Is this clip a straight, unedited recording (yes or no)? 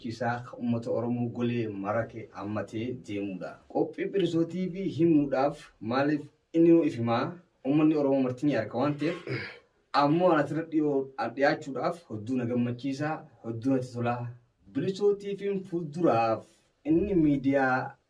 yes